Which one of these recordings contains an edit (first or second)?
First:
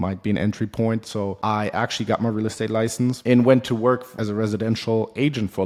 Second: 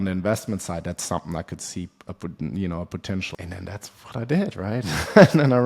second